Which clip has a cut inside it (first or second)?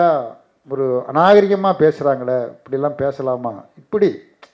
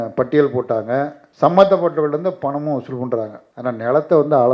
second